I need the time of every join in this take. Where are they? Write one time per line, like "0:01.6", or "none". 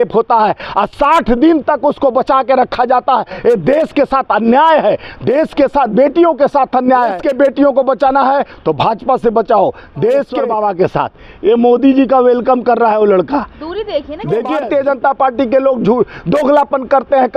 0:07.2
0:10.4
0:14.6